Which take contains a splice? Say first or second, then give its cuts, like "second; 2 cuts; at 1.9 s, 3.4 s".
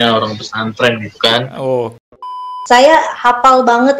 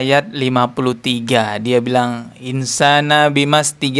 first; 1 cut; at 2.4 s